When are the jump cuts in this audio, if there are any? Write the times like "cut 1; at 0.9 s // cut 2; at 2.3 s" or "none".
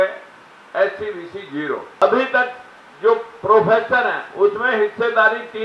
cut 1; at 2.0 s